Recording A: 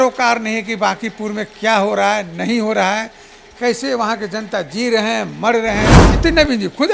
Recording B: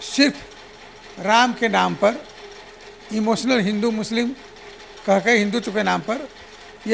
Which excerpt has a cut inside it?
A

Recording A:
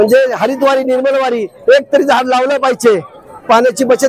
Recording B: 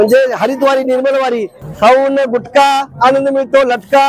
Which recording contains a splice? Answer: B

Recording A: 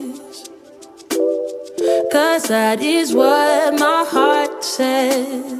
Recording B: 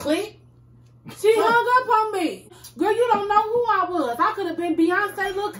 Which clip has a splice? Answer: B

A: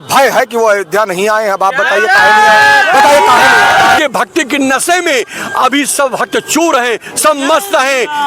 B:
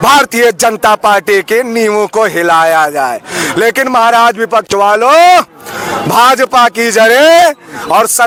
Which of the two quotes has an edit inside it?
A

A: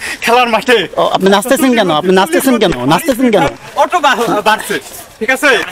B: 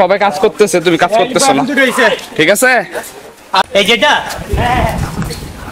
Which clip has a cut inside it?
B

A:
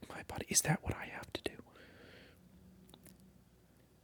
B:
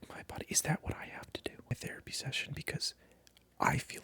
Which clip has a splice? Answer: B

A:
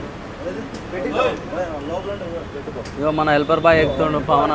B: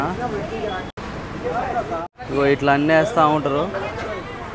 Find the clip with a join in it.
B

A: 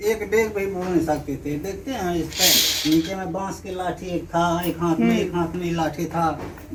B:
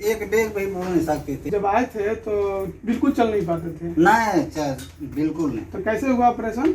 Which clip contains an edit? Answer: B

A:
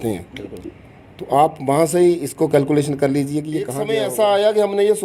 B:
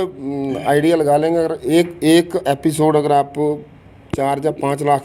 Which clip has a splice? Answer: A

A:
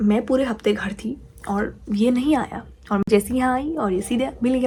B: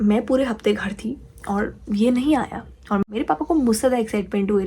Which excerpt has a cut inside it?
B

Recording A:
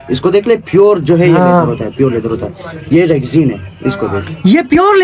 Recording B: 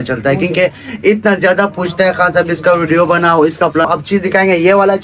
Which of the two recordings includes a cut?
B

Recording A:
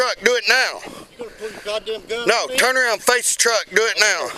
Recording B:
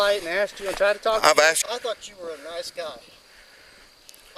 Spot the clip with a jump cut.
B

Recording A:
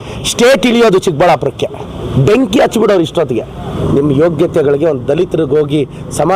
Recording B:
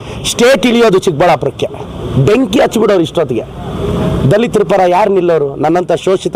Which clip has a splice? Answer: A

